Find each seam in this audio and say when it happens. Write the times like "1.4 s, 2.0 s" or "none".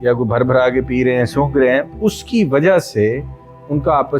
none